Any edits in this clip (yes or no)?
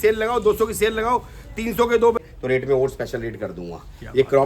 yes